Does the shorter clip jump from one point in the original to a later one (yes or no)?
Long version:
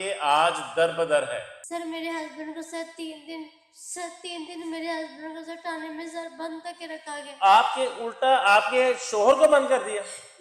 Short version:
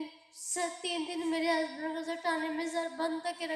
no